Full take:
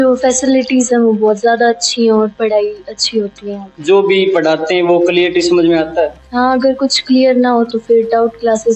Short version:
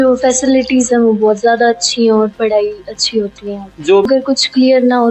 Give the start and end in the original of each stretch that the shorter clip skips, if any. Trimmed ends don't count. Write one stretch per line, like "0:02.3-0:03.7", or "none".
0:04.1-0:06.6